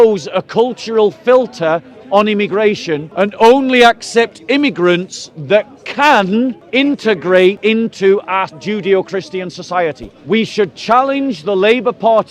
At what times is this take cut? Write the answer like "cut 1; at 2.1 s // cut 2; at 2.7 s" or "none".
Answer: cut 1; at 3.0 s // cut 2; at 6.6 s // cut 3; at 7.6 s // cut 4; at 8.6 s // cut 5; at 10.1 s